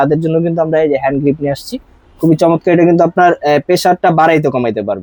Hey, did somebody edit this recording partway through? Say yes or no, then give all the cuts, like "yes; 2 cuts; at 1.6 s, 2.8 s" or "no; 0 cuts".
no; 0 cuts